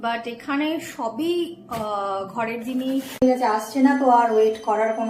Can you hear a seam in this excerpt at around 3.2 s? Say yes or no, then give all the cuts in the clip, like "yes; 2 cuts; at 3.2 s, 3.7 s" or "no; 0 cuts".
yes; 1 cut; at 3.2 s